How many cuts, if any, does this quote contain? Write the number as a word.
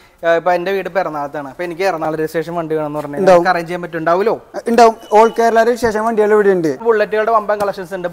one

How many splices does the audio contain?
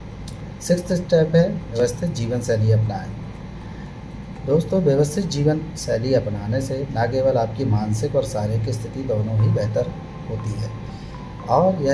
one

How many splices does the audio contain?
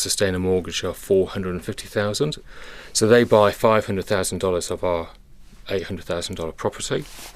one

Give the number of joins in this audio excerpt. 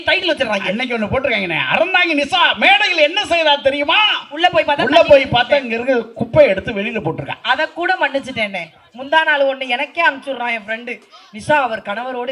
zero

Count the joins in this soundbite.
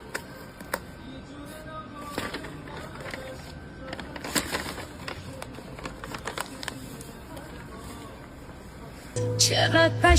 one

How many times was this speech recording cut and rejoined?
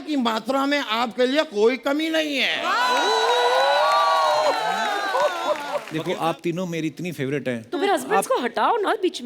one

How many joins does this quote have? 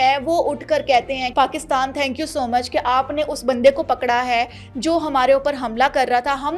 one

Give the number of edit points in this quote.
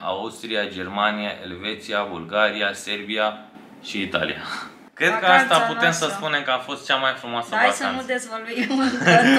one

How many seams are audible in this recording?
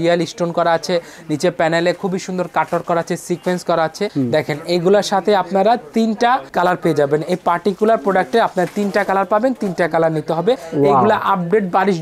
two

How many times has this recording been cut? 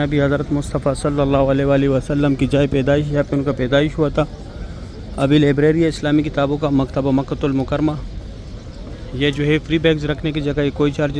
zero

